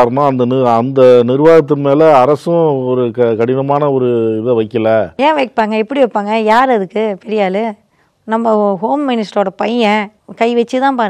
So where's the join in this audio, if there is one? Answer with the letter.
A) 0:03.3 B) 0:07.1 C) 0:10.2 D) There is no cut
C